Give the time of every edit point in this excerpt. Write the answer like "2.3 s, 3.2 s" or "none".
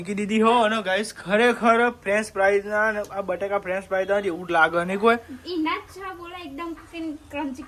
none